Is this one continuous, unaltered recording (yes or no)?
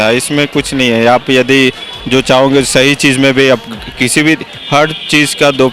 yes